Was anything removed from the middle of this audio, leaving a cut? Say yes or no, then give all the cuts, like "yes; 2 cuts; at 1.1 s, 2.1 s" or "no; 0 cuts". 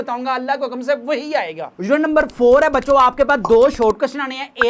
no; 0 cuts